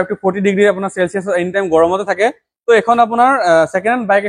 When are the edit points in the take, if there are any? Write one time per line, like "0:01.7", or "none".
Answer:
none